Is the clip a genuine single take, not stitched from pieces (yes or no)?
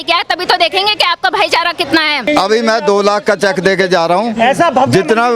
no